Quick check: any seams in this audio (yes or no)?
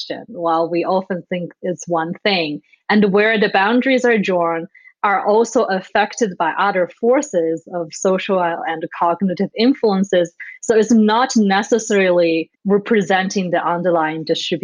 yes